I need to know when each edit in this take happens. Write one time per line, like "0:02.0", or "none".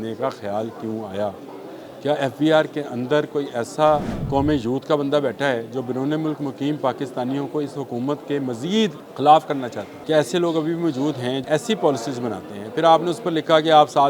0:04.2
0:09.0
0:09.9
0:11.4